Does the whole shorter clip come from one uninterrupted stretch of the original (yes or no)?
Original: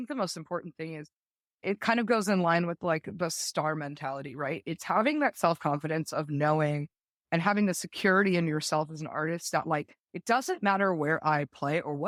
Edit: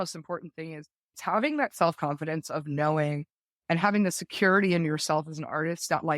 no